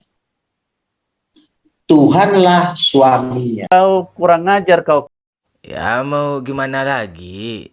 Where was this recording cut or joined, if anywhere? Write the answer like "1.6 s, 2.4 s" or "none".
3.5 s